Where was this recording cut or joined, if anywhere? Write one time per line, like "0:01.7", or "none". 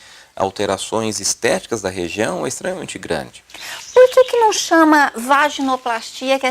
0:03.6